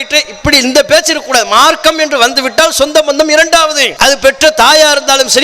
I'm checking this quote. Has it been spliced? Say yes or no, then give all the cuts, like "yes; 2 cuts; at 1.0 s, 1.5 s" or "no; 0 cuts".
yes; 1 cut; at 3.9 s